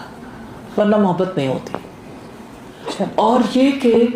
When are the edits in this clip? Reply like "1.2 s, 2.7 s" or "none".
2.8 s